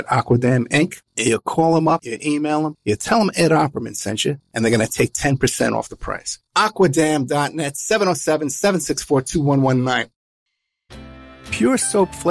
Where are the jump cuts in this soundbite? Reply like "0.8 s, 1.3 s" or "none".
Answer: 10.8 s